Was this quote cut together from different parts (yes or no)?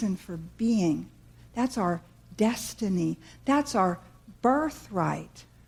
no